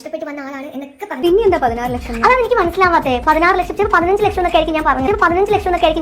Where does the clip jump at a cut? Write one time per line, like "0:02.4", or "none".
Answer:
0:01.2